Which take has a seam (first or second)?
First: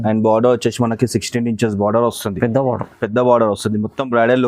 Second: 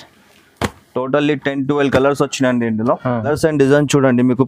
second